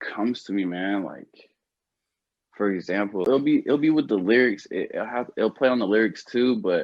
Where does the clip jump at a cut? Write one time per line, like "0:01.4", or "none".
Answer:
0:03.2

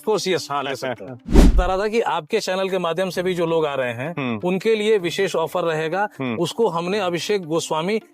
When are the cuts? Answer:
0:01.6

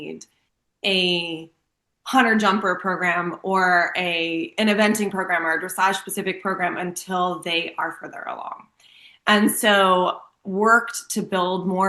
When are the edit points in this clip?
none

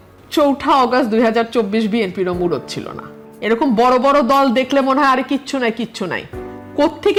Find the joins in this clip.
none

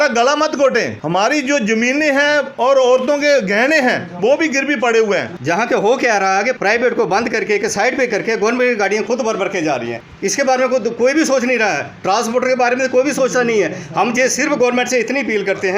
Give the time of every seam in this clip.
0:01.0
0:05.3
0:10.0

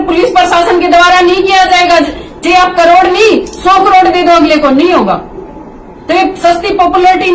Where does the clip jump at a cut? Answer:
none

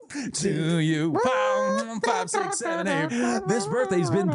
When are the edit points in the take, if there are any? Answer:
0:03.1

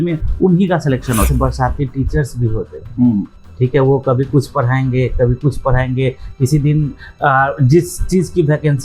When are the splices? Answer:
0:01.3

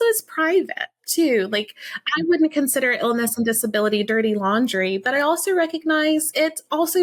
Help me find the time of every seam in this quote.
none

